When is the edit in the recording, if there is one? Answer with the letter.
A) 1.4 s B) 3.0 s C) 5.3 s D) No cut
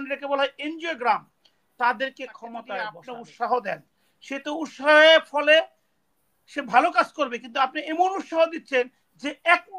B